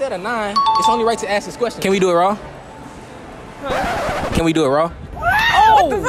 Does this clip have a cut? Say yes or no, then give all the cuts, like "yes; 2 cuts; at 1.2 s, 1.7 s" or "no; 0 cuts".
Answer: yes; 1 cut; at 4.3 s